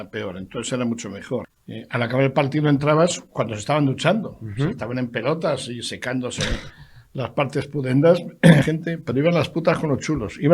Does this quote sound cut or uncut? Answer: cut